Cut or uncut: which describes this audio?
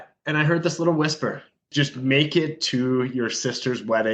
cut